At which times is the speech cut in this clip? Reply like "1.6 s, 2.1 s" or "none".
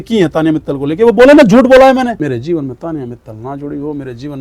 2.2 s